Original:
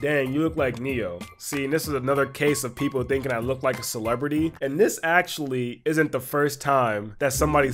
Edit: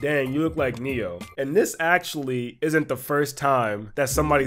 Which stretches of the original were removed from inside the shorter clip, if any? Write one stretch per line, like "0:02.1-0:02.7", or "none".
0:01.3-0:04.6